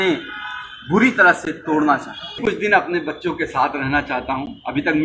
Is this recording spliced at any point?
yes; 1 cut; at 2.4 s

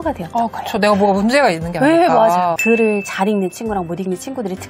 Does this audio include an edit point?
yes; 1 cut; at 2.6 s

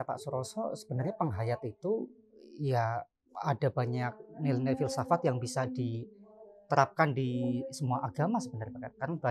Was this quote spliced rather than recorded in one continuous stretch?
no; 0 cuts

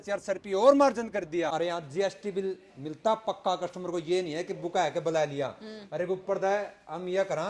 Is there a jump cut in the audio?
yes; 1 cut; at 1.5 s

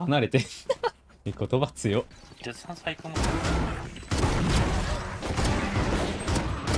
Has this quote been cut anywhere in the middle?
yes; 3 cuts; at 2.2 s, 3.9 s, 5.2 s

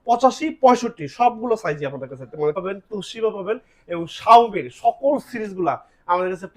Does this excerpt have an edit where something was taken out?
yes; 1 cut; at 2.6 s

